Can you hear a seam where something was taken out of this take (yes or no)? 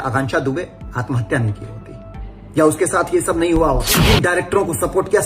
yes